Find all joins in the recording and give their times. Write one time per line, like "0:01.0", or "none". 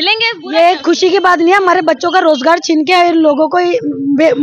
none